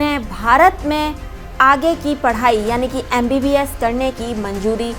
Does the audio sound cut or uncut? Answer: uncut